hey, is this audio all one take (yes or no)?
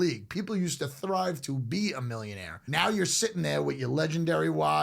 no